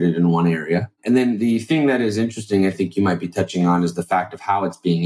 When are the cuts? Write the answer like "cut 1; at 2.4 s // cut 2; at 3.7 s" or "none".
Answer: cut 1; at 1.0 s